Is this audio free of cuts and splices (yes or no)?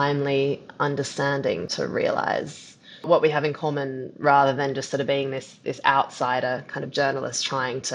no